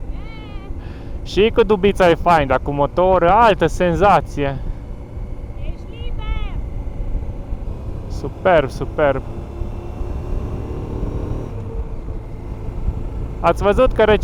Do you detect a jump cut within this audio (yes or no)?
no